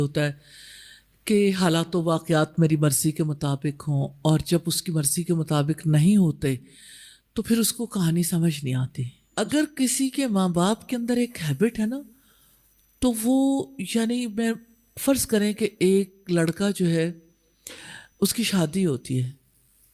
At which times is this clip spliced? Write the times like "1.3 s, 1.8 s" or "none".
9.0 s